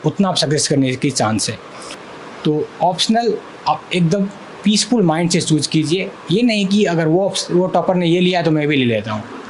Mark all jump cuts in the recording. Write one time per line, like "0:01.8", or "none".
0:01.9